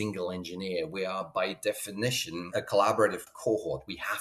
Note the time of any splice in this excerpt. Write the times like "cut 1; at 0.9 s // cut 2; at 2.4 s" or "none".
cut 1; at 2.5 s // cut 2; at 3.3 s